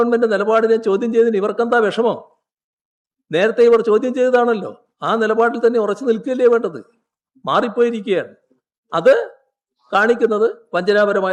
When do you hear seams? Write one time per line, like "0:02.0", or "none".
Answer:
none